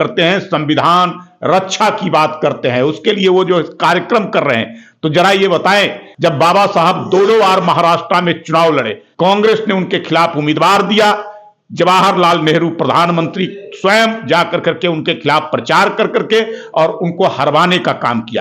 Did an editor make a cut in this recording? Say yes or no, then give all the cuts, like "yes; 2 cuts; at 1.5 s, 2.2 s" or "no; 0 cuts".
yes; 2 cuts; at 6.1 s, 9.0 s